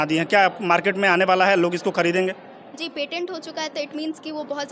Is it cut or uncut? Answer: uncut